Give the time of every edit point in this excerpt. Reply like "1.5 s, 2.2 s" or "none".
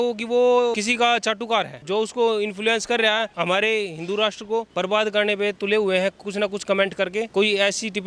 0.8 s, 1.8 s, 3.3 s, 4.7 s, 7.3 s